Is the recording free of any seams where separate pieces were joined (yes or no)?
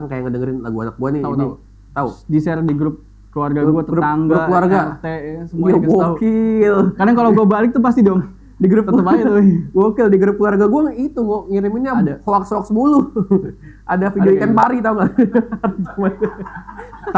yes